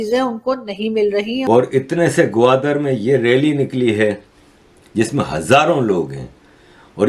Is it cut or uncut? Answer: cut